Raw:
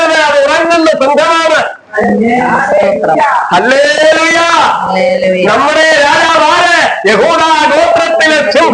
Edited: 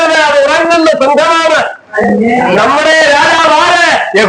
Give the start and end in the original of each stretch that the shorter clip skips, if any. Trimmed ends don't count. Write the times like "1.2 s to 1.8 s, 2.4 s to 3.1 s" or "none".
2.5 s to 5.4 s